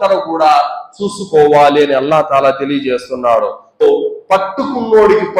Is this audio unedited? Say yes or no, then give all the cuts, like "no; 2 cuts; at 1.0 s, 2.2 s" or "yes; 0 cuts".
no; 1 cut; at 3.8 s